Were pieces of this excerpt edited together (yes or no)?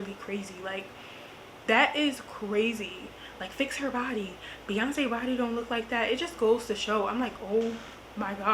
no